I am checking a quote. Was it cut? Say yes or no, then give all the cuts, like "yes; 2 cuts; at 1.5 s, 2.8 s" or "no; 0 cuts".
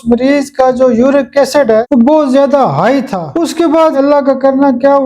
yes; 2 cuts; at 1.9 s, 3.2 s